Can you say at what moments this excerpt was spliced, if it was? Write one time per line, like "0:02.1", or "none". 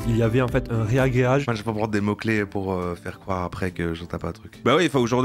0:01.5